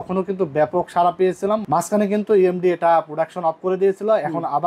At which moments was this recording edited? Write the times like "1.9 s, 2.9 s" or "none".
none